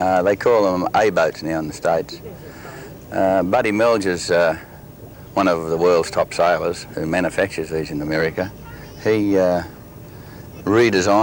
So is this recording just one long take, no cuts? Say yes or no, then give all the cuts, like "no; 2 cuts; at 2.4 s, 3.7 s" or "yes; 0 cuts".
yes; 0 cuts